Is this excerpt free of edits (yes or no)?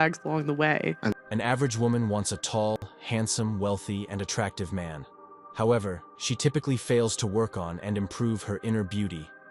no